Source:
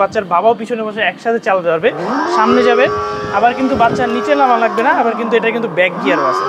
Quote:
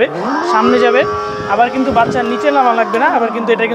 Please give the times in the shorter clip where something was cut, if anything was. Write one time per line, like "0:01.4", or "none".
none